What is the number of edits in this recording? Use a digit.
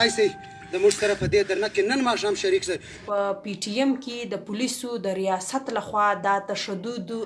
1